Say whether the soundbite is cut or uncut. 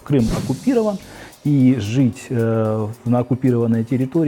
uncut